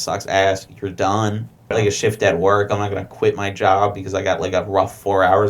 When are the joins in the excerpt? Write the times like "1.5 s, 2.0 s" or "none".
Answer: 1.7 s